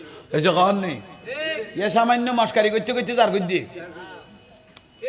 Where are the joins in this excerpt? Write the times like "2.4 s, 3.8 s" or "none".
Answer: none

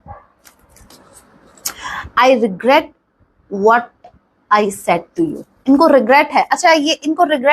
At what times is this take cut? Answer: 0.9 s

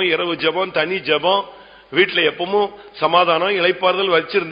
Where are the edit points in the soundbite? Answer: none

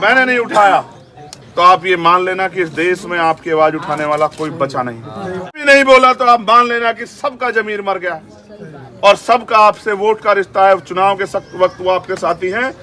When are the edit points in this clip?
5.6 s

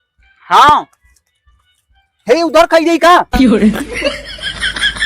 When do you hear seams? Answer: 3.3 s

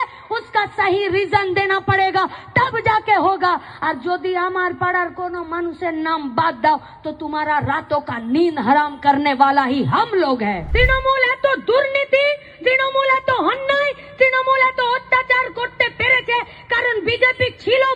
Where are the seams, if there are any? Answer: 10.6 s

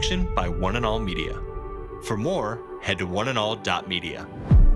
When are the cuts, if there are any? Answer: none

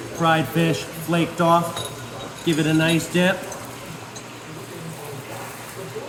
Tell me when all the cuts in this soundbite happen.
none

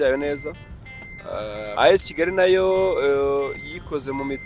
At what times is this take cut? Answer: 1.7 s

